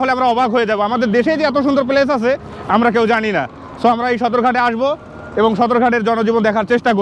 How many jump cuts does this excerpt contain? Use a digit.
0